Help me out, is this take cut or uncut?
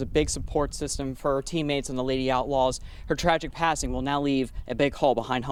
uncut